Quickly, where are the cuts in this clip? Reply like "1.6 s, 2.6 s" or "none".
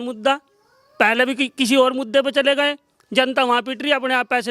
none